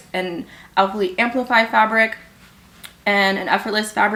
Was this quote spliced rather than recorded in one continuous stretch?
no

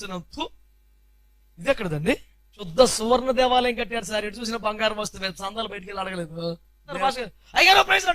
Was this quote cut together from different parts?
yes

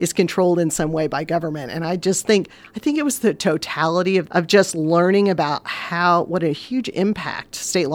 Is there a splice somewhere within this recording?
yes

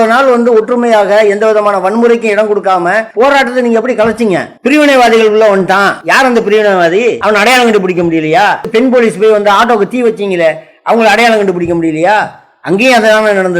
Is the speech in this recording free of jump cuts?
no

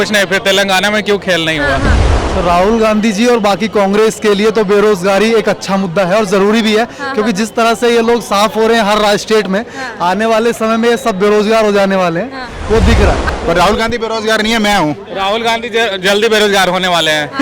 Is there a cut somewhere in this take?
yes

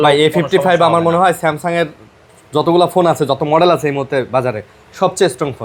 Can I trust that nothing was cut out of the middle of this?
yes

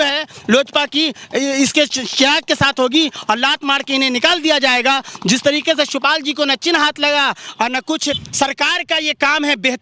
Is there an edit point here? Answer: yes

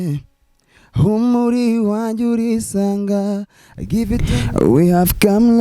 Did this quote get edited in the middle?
yes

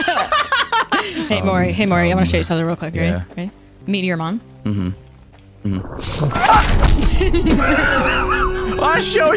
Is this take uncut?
no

